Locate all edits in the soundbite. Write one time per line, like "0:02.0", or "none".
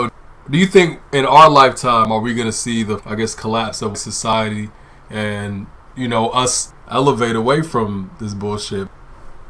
0:03.0
0:04.3
0:06.6

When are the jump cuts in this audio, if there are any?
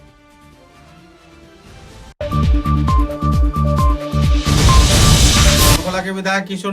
0:02.1
0:05.8

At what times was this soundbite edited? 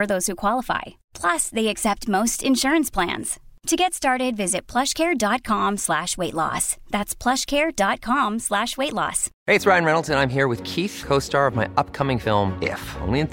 0:09.3

